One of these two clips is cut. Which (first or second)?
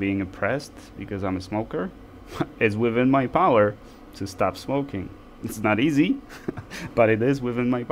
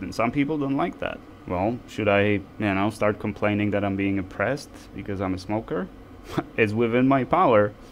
second